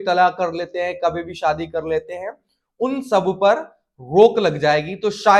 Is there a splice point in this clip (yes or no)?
no